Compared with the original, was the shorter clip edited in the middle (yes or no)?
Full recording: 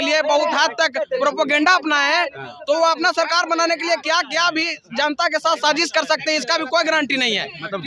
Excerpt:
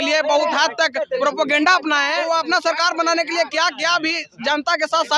yes